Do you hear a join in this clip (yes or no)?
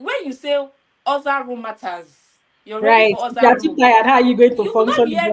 no